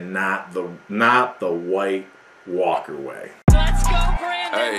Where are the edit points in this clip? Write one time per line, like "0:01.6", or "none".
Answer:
0:03.3